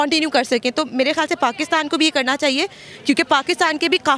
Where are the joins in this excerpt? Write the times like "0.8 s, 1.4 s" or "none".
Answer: none